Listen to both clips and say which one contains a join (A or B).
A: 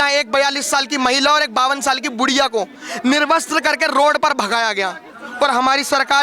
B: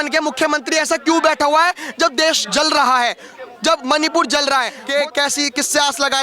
B